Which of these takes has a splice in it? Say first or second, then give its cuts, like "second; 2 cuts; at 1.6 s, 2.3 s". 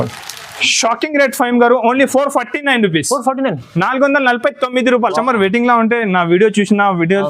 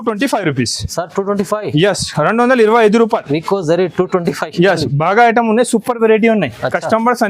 first; 1 cut; at 5.2 s